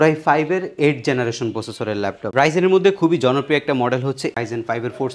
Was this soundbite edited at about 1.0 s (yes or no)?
no